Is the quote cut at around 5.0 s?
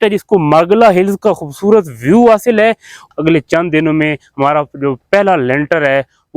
no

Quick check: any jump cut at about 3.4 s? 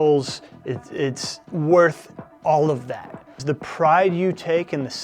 yes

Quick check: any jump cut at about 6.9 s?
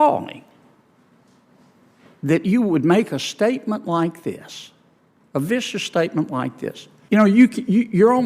yes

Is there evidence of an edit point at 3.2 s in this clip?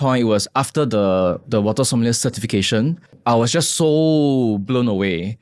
yes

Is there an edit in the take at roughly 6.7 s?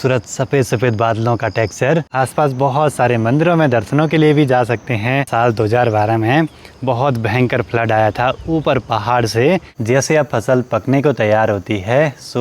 no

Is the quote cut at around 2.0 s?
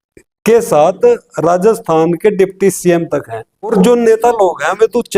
no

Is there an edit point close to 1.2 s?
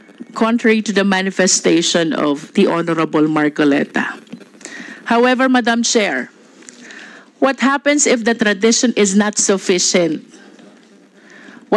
no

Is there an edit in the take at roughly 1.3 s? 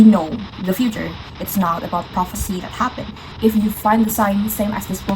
no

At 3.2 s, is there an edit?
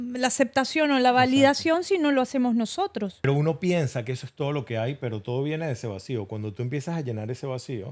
yes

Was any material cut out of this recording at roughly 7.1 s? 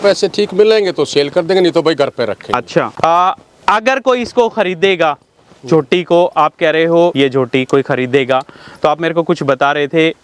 yes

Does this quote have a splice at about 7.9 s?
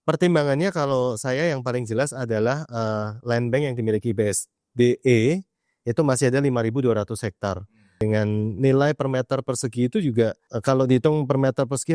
yes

